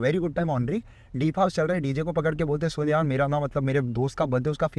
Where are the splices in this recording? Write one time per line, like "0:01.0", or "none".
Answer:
none